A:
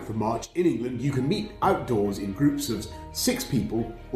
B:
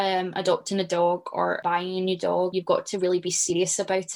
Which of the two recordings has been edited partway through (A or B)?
B